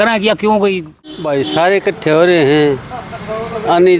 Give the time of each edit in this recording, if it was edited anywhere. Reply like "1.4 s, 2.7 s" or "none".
1.2 s